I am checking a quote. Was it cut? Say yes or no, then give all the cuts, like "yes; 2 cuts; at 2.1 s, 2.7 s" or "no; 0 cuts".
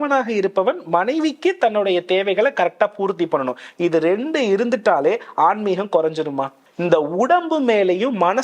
yes; 1 cut; at 6.6 s